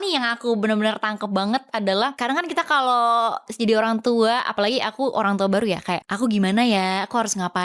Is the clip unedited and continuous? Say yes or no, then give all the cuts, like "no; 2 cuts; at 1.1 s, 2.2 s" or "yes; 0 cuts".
no; 2 cuts; at 2.1 s, 6.1 s